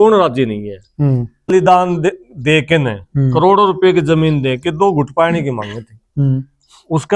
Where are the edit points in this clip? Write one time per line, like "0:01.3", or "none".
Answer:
0:01.5